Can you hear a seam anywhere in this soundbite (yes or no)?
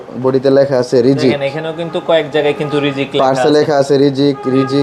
no